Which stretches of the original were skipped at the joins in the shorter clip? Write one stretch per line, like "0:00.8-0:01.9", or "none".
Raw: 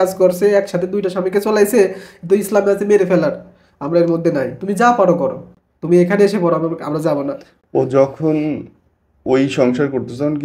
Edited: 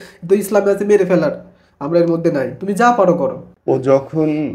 0:05.5-0:07.5